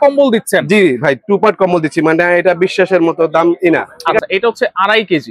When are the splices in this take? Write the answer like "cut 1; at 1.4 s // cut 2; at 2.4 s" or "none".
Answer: cut 1; at 3.9 s